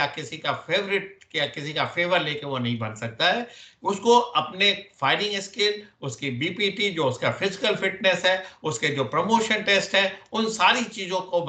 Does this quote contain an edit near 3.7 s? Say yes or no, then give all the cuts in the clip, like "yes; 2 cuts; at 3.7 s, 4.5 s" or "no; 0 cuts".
no; 0 cuts